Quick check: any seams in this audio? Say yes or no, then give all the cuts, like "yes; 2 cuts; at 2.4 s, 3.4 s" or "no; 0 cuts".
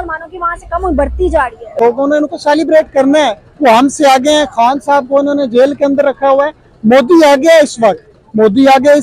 yes; 1 cut; at 1.8 s